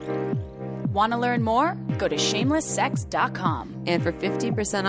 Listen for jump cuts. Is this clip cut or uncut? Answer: cut